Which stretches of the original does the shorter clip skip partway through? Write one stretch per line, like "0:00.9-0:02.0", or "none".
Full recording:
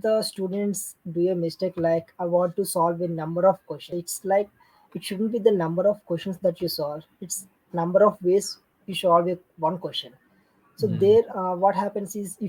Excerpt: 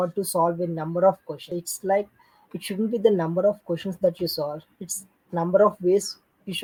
none